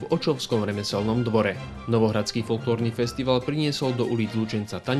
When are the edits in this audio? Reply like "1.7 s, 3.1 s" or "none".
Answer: 1.7 s

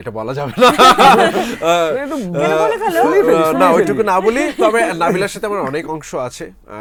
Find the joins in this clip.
none

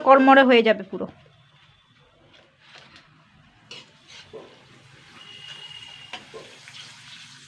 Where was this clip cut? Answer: 2.6 s

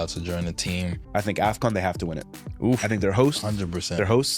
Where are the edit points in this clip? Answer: 1.0 s

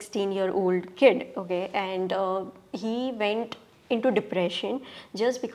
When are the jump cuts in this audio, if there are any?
none

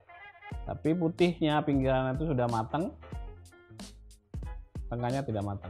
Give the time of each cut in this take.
3.1 s, 4.8 s

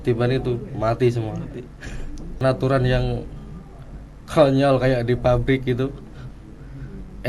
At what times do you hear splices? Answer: 2.4 s

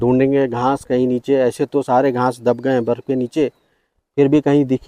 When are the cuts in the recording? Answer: none

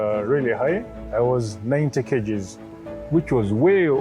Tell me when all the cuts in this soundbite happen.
1.0 s

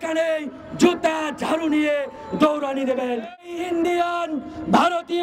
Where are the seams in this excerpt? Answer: 3.4 s

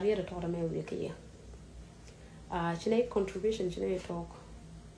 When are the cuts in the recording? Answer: none

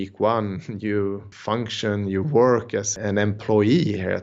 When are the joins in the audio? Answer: 1.3 s, 2.9 s

